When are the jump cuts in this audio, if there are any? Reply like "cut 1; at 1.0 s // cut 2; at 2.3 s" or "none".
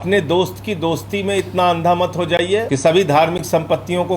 cut 1; at 2.7 s